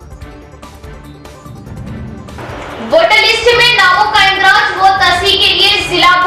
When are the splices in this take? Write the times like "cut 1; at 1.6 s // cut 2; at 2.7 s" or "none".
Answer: cut 1; at 2.3 s